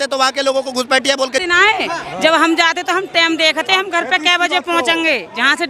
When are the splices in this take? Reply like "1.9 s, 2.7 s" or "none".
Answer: 1.4 s